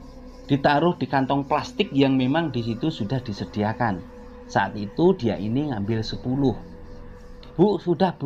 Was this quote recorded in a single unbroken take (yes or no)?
yes